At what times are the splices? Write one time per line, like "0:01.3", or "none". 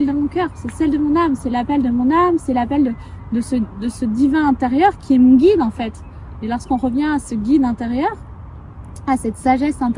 none